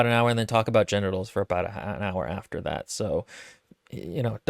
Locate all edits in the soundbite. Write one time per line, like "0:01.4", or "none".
none